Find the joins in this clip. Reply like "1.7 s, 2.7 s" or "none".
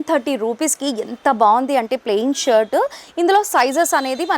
3.0 s